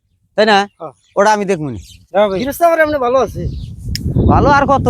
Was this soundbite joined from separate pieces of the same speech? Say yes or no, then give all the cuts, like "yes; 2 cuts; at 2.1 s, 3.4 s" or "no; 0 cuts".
yes; 1 cut; at 1.9 s